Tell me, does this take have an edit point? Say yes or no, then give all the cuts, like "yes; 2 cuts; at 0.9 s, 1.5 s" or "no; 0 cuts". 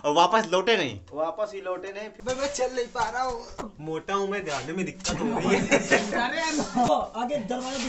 yes; 2 cuts; at 2.1 s, 3.6 s